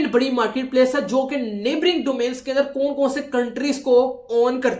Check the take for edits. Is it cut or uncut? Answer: uncut